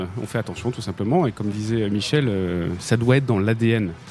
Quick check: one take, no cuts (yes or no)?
yes